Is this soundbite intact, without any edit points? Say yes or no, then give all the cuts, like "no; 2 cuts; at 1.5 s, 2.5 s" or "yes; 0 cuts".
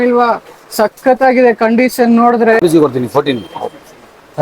no; 1 cut; at 2.6 s